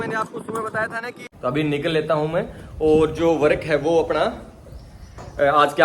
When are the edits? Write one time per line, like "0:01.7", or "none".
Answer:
0:01.3